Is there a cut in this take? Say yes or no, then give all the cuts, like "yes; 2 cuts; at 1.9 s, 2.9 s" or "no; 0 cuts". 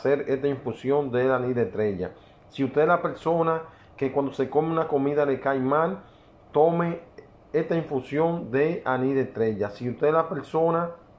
no; 0 cuts